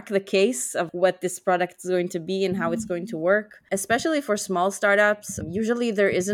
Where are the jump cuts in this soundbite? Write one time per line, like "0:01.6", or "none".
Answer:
0:03.6
0:05.3